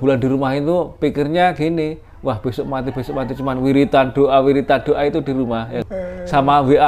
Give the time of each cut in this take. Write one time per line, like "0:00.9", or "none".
0:05.8